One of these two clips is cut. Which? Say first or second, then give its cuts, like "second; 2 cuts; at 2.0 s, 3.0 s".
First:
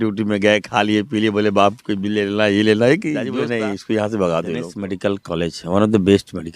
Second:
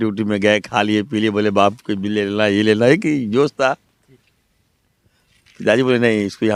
first; 2 cuts; at 3.3 s, 4.8 s